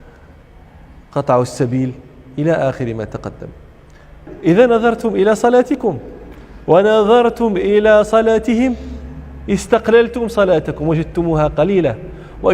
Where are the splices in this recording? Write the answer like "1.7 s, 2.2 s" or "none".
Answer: 4.1 s